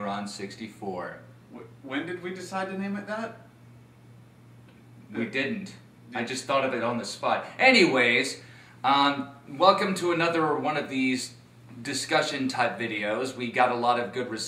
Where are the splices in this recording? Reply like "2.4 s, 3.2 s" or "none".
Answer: none